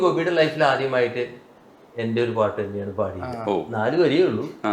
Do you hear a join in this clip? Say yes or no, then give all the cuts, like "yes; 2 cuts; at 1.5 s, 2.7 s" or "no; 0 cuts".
no; 0 cuts